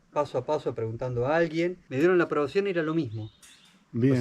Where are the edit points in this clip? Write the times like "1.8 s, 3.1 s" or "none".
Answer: 1.8 s